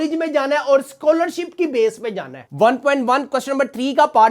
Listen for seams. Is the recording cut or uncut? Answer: cut